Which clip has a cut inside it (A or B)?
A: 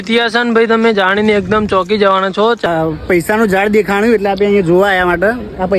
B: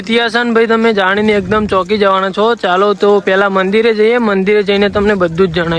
A